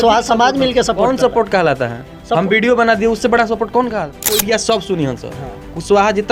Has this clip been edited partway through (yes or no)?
yes